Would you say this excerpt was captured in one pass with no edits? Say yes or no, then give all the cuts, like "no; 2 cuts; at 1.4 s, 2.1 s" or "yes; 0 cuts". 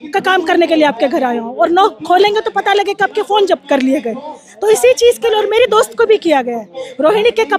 yes; 0 cuts